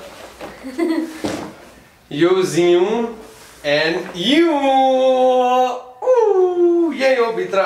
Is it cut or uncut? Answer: uncut